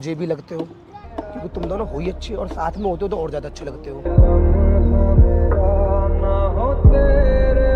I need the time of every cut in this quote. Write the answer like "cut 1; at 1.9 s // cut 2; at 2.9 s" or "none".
none